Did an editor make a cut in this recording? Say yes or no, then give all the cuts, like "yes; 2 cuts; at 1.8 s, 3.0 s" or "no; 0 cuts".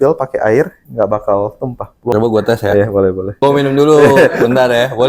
yes; 2 cuts; at 2.1 s, 3.4 s